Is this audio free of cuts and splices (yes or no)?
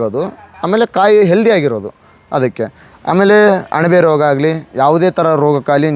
yes